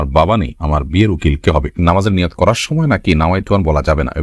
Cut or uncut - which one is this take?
cut